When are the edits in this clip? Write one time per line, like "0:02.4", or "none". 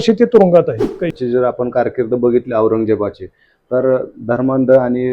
0:01.1